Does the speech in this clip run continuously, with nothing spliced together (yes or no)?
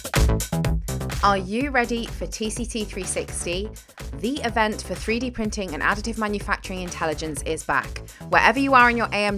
no